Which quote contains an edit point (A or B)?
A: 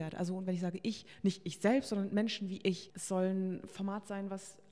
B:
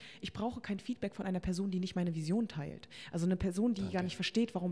A